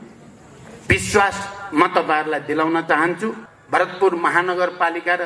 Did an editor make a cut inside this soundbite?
yes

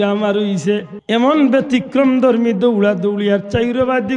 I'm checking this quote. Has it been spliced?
yes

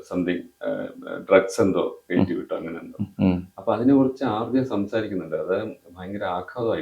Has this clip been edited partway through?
no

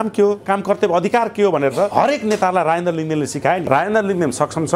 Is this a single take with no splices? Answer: no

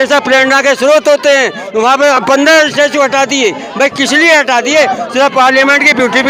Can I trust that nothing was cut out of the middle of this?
yes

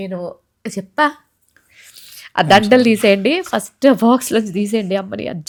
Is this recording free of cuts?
yes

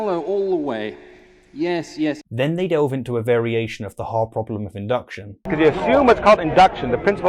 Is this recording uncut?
yes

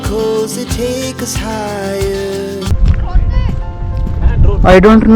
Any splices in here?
yes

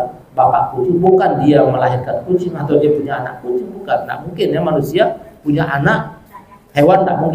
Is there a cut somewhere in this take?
no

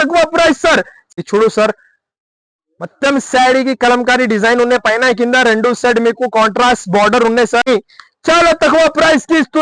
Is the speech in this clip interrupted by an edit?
yes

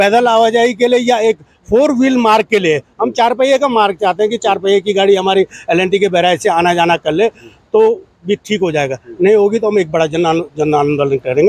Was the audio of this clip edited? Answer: no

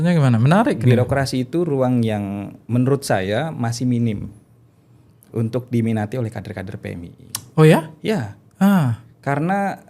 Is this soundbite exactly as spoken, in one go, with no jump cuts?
yes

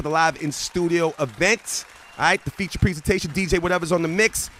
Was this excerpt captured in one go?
yes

